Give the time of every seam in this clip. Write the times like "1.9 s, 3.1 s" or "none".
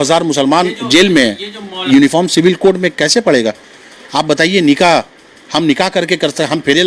1.9 s